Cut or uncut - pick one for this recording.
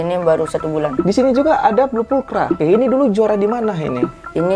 cut